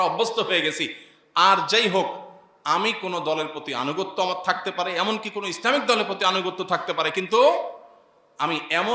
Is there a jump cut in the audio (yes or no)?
no